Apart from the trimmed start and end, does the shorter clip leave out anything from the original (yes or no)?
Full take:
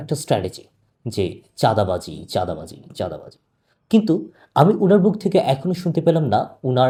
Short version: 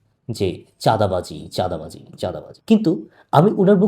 yes